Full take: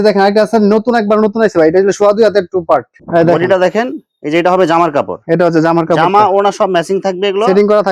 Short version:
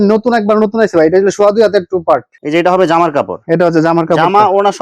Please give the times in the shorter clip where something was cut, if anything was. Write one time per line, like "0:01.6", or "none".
0:02.3